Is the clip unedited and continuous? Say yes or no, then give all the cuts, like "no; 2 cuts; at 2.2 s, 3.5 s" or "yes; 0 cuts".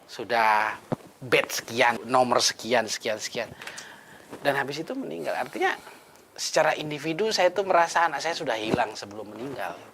no; 1 cut; at 2.0 s